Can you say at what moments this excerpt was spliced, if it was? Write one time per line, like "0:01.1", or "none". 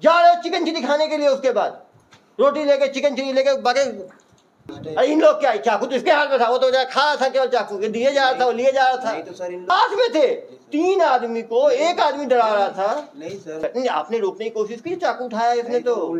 0:04.7
0:09.7
0:13.6